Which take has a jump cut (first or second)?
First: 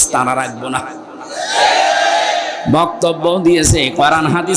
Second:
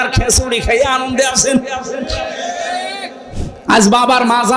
second